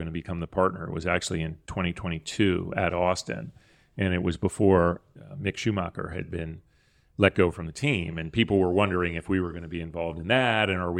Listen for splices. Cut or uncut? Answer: uncut